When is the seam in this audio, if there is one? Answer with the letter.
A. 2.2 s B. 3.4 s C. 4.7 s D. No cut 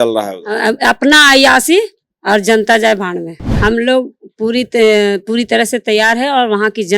B